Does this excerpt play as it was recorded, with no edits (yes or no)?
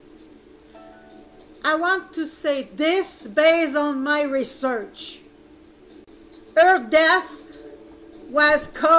yes